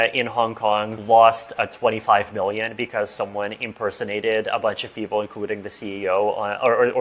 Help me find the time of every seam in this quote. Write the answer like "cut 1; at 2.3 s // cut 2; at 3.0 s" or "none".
cut 1; at 0.9 s